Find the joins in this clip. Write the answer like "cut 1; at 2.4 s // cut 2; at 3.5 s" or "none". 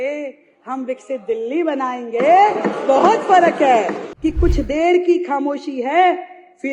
cut 1; at 4.0 s

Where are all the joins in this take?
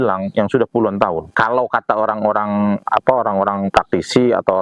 cut 1; at 1.3 s

